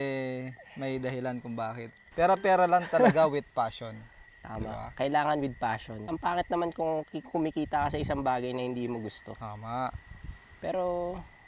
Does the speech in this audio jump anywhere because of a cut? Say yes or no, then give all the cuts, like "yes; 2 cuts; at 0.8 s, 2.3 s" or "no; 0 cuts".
no; 0 cuts